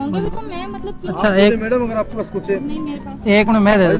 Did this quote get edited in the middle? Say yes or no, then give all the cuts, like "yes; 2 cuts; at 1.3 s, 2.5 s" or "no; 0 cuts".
no; 0 cuts